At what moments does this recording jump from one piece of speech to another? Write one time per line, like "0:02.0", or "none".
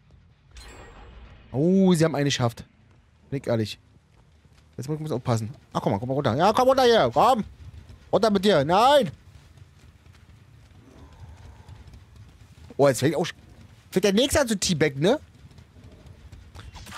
none